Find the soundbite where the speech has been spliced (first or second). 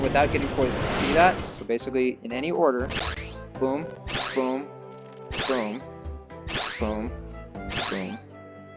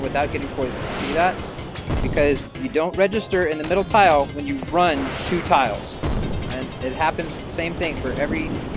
first